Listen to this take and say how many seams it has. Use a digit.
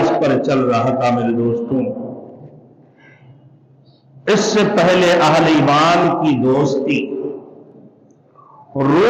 0